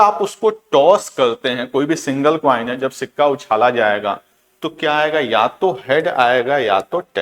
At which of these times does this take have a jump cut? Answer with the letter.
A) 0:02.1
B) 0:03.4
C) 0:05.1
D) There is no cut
D